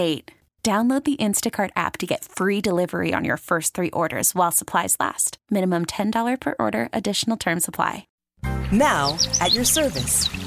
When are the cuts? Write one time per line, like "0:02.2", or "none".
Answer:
0:08.2